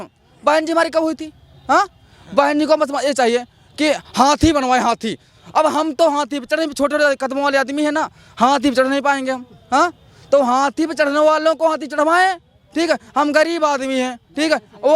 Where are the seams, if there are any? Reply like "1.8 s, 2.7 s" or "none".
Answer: none